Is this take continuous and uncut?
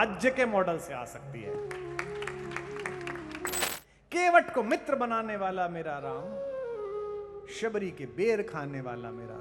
no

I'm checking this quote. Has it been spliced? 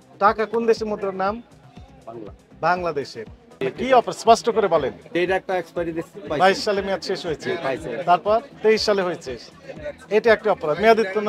yes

